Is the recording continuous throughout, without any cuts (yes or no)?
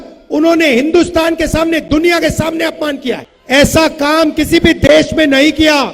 no